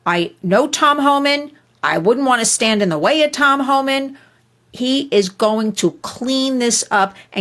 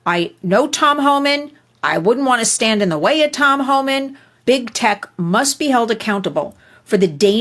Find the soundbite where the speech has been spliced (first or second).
second